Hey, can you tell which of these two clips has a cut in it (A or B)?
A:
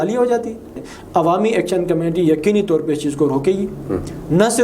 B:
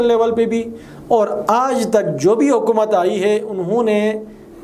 A